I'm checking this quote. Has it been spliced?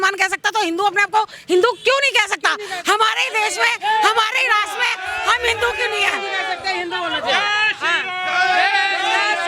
no; 0 cuts

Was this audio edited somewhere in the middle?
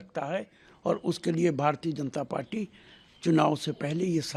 no; 0 cuts

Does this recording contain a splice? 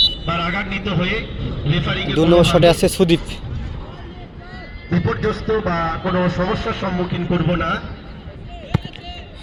no; 0 cuts

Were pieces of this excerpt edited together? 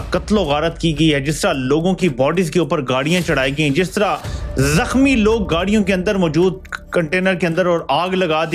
no; 0 cuts

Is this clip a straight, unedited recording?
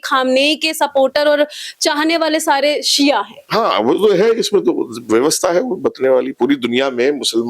no; 1 cut; at 3.4 s

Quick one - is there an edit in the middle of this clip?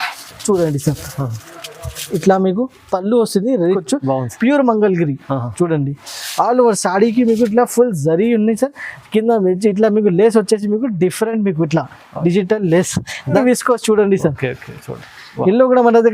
yes; 2 cuts; at 3.8 s, 13.4 s

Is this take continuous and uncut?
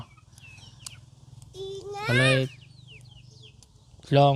yes; 0 cuts

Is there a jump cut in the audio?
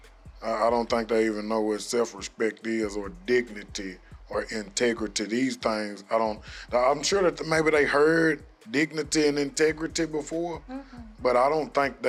no; 0 cuts

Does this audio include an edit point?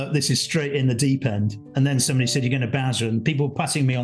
no; 0 cuts

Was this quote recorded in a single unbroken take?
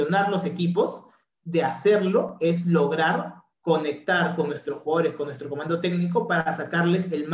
no; 1 cut; at 3.9 s

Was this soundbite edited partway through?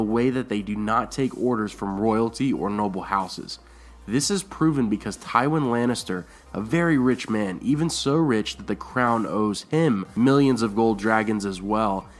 no; 0 cuts

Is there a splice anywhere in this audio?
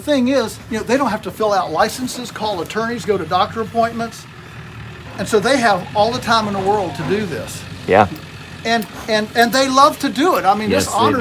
no; 0 cuts

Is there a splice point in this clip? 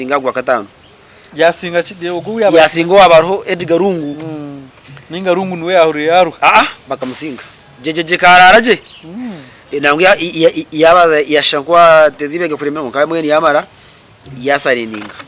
no; 0 cuts

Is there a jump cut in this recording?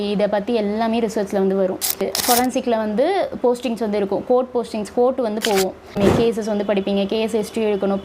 yes; 2 cuts; at 2.0 s, 6.0 s

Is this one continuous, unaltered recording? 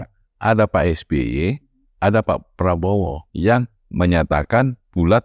no; 1 cut; at 3.2 s

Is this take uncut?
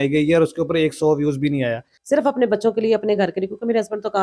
no; 1 cut; at 1.9 s

